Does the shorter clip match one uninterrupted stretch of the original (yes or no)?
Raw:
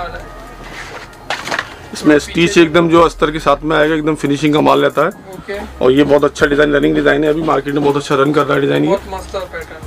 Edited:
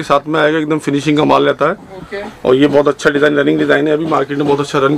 yes